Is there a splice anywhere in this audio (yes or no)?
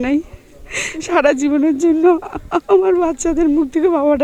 no